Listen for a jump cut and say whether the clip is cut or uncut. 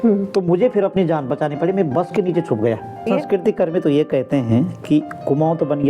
cut